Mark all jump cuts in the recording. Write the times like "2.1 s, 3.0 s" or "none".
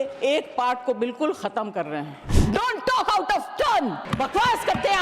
2.3 s, 4.0 s

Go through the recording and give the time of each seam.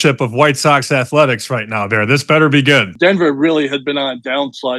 2.9 s

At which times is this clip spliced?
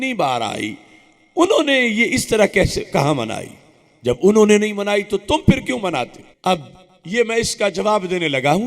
6.2 s

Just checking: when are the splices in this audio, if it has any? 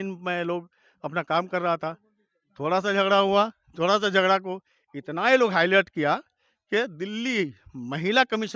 none

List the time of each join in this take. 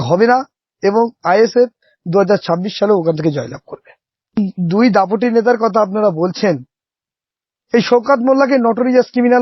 4.4 s

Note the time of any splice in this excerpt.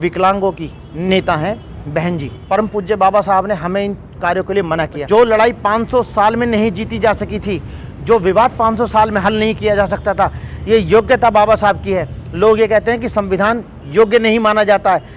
2.3 s, 5.0 s

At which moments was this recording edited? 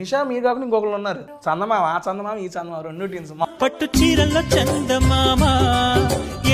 1.3 s, 3.5 s

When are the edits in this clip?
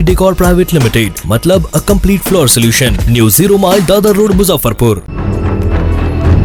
none

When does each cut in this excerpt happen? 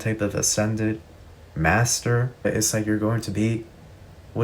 2.5 s

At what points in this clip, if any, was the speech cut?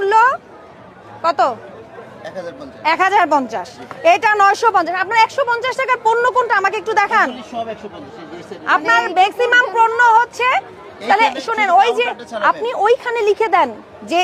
none

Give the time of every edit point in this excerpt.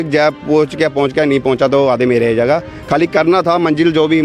none

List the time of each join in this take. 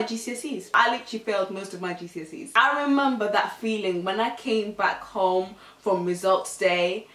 0.7 s, 2.5 s

